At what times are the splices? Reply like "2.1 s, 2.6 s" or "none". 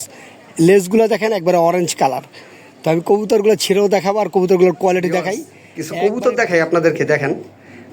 5.8 s